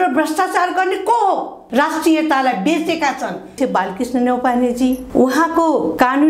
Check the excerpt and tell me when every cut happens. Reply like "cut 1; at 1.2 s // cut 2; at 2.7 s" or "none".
cut 1; at 1.6 s // cut 2; at 3.5 s